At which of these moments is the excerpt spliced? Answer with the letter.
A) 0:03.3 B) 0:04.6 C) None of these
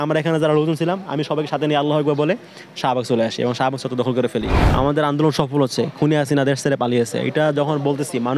B